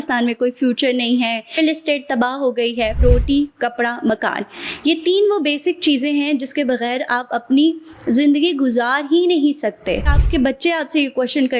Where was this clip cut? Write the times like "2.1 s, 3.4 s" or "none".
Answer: 3.0 s, 10.2 s